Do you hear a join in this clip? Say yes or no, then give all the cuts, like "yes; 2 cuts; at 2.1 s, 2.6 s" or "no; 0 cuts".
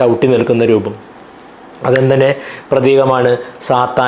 no; 0 cuts